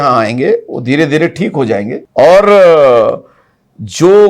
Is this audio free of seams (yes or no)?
yes